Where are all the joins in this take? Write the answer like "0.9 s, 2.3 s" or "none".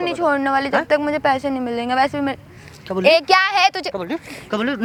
none